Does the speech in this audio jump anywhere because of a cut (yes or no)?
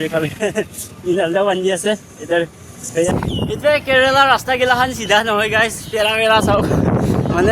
yes